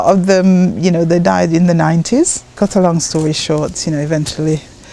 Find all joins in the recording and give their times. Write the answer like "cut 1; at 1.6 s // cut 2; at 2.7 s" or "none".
cut 1; at 2.5 s